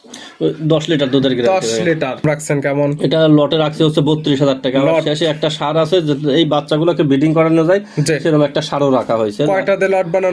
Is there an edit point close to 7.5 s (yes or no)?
no